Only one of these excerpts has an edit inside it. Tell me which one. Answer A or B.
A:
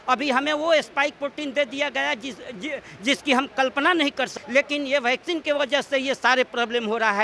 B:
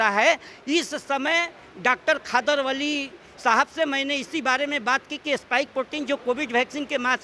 A